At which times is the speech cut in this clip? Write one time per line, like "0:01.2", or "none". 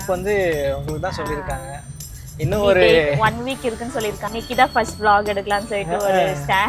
0:04.2